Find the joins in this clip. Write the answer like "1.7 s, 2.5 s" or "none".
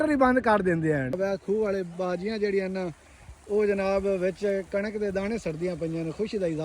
1.2 s